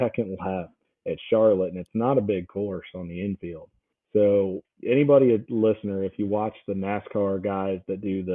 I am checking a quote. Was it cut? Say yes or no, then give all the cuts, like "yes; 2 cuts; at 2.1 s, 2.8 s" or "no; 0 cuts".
no; 0 cuts